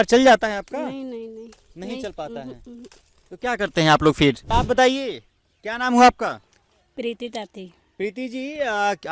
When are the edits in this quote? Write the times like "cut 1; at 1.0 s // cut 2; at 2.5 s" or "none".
cut 1; at 4.4 s